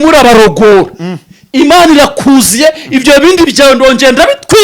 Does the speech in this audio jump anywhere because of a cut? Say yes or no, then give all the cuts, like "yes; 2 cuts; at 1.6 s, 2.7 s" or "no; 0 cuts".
no; 0 cuts